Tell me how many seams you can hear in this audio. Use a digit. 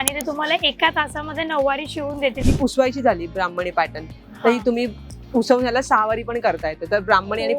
1